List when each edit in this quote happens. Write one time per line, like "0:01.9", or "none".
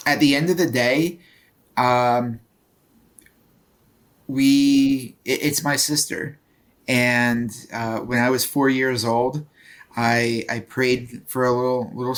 none